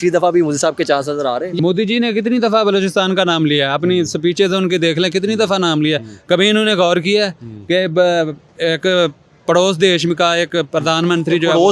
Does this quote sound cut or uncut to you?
cut